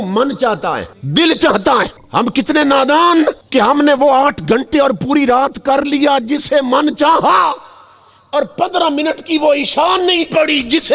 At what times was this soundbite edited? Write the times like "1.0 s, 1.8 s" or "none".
0.9 s, 2.0 s, 3.4 s